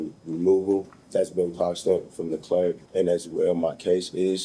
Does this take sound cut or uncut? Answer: cut